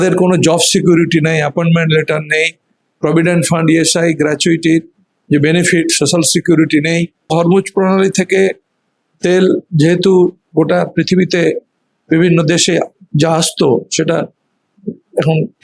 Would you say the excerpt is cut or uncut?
cut